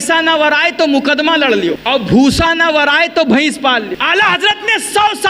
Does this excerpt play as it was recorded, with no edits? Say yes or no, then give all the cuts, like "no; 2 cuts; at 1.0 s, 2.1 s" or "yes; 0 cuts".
no; 2 cuts; at 1.8 s, 4.0 s